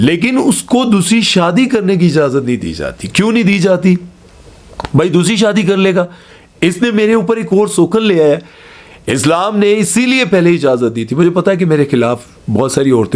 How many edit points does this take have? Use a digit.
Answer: 0